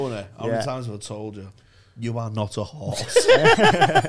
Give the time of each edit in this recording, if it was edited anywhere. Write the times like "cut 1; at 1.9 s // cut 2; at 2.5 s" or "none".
none